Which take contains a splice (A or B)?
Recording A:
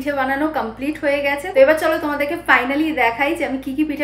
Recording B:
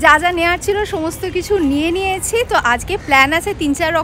A